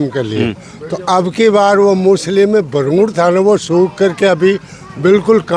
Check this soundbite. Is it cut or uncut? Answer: uncut